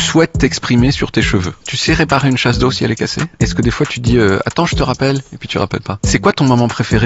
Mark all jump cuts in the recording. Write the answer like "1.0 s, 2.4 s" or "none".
1.7 s, 3.4 s, 5.9 s